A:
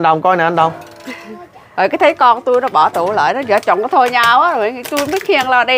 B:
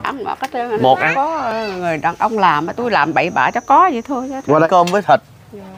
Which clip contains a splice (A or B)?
B